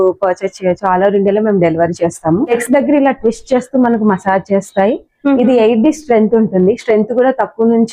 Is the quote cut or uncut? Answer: cut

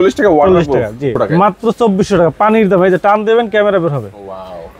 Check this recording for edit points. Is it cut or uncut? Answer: cut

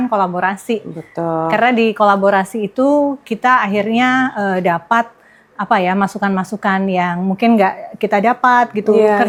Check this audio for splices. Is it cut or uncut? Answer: uncut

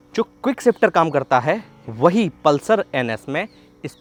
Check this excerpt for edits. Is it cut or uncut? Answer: uncut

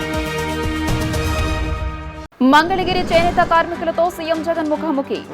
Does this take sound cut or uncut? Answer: cut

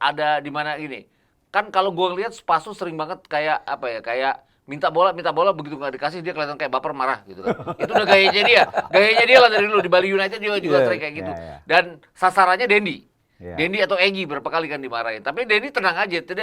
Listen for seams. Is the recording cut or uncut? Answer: uncut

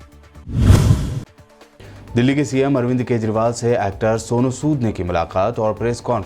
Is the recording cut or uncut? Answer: cut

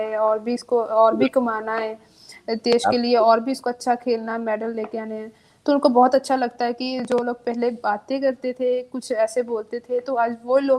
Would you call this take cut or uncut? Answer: uncut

